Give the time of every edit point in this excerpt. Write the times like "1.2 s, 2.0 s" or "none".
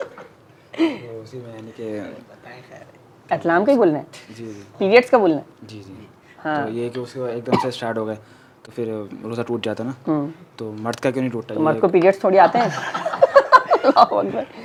none